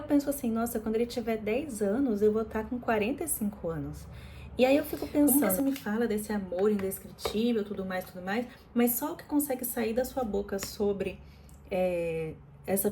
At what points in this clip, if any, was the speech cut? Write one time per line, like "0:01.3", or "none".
0:05.3